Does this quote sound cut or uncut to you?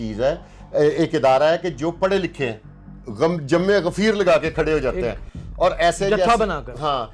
cut